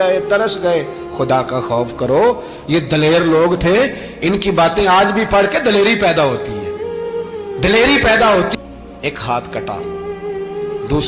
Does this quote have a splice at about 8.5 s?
yes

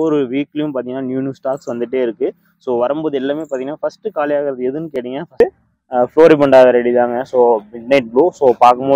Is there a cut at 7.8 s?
no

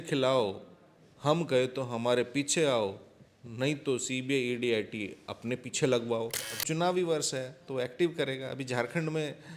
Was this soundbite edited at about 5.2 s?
no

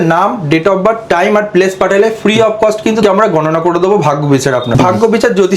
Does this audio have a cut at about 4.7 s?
yes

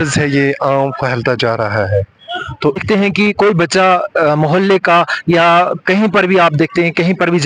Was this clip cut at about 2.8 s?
yes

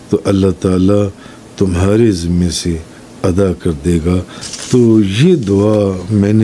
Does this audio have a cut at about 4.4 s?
yes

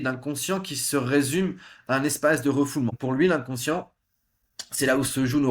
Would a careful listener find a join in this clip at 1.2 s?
no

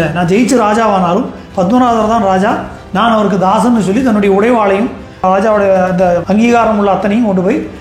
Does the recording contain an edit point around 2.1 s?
no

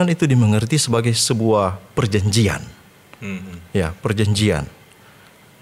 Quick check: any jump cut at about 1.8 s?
no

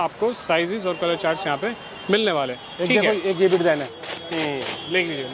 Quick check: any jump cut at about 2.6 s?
no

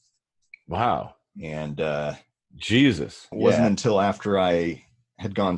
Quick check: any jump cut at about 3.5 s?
yes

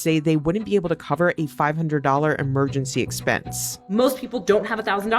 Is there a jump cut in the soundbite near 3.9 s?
yes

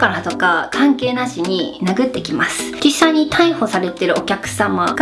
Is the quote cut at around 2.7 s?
yes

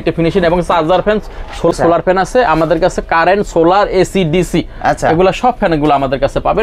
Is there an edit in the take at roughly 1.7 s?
yes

